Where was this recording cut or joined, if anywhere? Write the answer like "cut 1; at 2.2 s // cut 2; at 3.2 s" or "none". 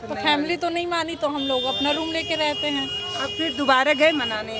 cut 1; at 3.0 s